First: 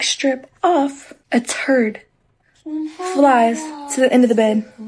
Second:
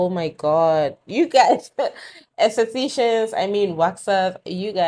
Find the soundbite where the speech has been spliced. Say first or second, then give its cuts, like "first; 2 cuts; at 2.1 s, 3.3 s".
first; 1 cut; at 1.1 s